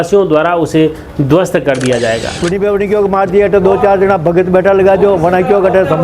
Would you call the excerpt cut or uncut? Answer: cut